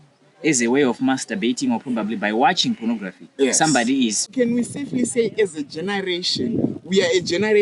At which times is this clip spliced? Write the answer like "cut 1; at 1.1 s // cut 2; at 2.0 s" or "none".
cut 1; at 4.3 s